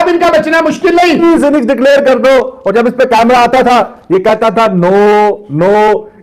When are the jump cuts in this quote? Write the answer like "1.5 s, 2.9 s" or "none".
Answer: 1.2 s

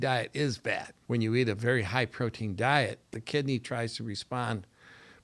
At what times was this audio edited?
0.9 s, 3.1 s

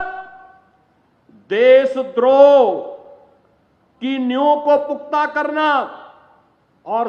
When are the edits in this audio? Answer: none

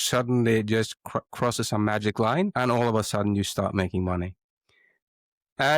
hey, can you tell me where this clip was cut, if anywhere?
2.5 s

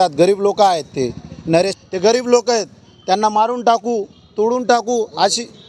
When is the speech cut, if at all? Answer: 1.7 s

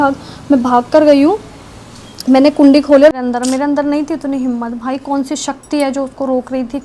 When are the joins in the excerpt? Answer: 3.1 s

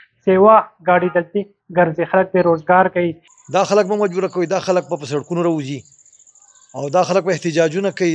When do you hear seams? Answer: 3.3 s

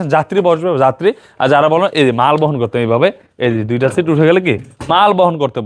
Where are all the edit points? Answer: none

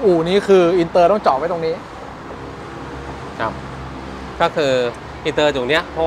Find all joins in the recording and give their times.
none

